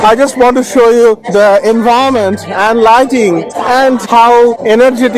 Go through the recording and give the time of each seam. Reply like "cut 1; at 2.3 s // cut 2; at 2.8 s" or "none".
cut 1; at 1.2 s // cut 2; at 4.0 s